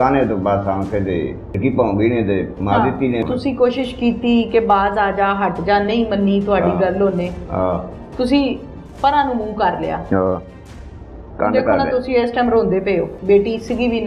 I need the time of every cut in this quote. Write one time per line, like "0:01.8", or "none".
0:01.6
0:03.2
0:13.2